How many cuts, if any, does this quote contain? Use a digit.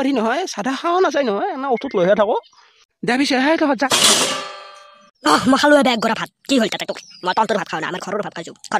1